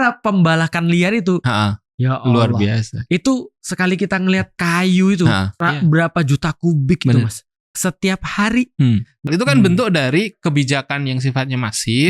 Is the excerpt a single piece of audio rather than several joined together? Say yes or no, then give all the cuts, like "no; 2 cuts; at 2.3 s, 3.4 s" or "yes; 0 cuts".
no; 4 cuts; at 4.5 s, 5.5 s, 7.6 s, 9.2 s